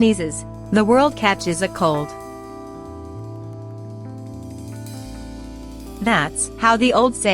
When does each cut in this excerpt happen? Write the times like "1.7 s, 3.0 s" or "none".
2.7 s, 6.0 s